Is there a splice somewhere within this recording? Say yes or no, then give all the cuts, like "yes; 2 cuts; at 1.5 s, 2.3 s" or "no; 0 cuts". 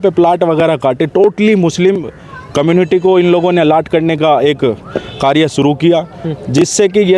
no; 0 cuts